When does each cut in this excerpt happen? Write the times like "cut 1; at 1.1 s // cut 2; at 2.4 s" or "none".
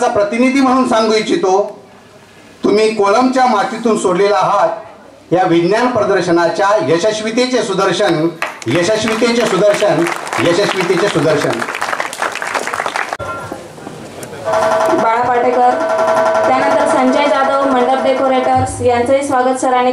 cut 1; at 13.2 s